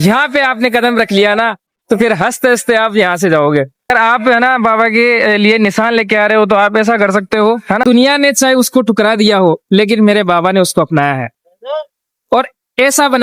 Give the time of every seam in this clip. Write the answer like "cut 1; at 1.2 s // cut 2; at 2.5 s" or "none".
cut 1; at 3.9 s // cut 2; at 7.8 s